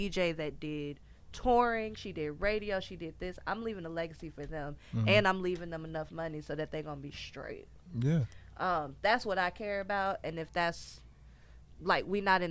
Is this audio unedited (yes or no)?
yes